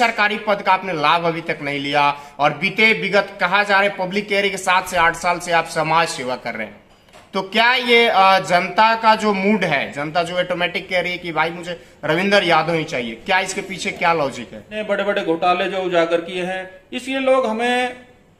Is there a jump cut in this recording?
yes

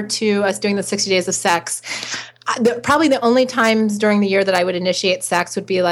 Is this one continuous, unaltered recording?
yes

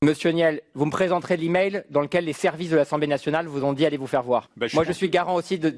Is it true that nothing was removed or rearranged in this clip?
no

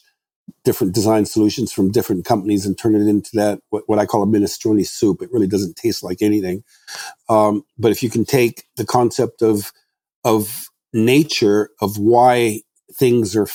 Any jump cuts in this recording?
no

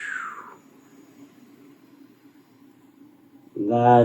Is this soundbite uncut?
yes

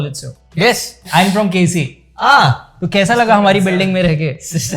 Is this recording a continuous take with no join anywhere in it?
no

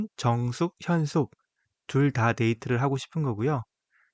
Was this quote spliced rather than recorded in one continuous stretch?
no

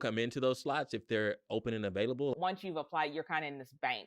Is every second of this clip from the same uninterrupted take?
no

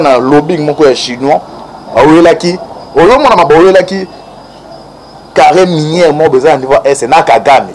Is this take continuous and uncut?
yes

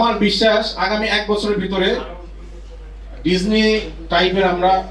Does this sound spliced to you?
no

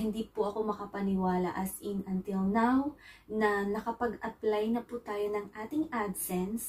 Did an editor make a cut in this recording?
no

